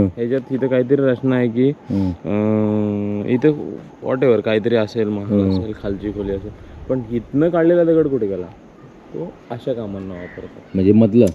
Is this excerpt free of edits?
yes; 0 cuts

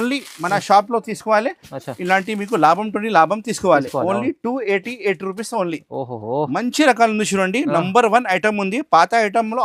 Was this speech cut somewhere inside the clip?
no; 0 cuts

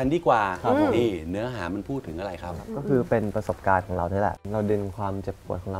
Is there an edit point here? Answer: yes; 2 cuts; at 2.7 s, 4.4 s

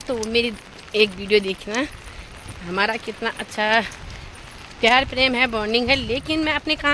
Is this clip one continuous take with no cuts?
yes; 0 cuts

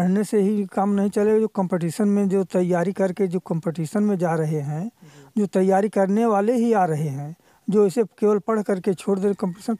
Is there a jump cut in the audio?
no; 0 cuts

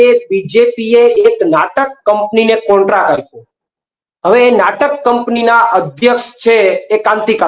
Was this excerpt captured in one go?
yes; 0 cuts

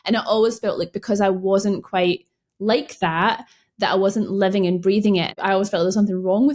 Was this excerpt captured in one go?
no; 1 cut; at 5.3 s

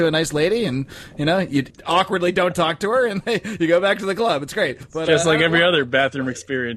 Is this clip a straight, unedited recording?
no; 2 cuts; at 1.7 s, 4.8 s

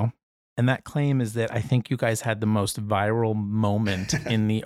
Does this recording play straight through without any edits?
yes; 0 cuts

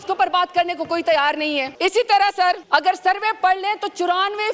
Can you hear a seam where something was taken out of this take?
yes; 2 cuts; at 1.7 s, 2.6 s

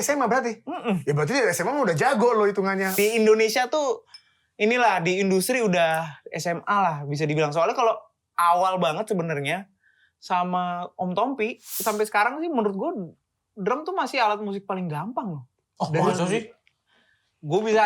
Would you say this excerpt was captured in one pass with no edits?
no; 2 cuts; at 2.9 s, 11.7 s

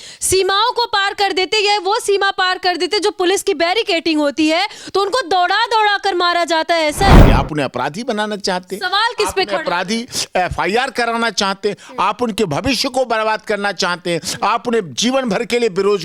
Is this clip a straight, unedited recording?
no; 1 cut; at 7.2 s

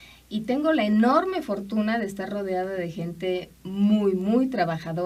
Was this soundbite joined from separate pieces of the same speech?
yes; 1 cut; at 1.1 s

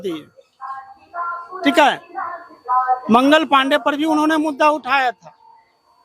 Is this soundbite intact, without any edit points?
yes; 0 cuts

